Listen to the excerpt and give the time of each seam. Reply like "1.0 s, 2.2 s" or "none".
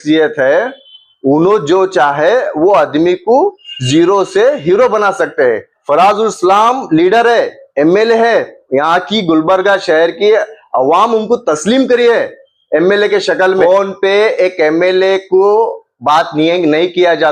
5.7 s, 13.6 s